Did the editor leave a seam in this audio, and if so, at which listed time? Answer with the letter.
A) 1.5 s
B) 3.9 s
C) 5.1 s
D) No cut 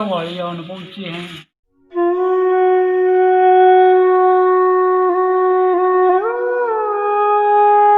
A